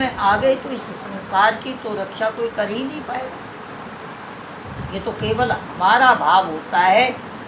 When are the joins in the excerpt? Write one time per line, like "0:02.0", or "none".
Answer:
none